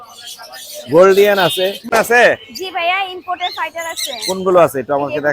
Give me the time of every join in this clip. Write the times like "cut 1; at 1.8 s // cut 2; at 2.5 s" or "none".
cut 1; at 1.9 s